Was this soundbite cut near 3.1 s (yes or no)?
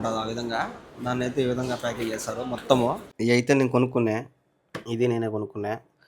yes